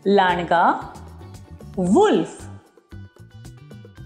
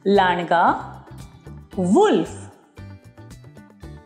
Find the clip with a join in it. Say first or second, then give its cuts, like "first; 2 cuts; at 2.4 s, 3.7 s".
first; 1 cut; at 2.4 s